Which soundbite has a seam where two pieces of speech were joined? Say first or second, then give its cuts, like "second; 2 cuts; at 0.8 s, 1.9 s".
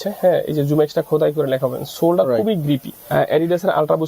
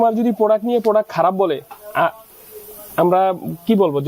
first; 1 cut; at 2.9 s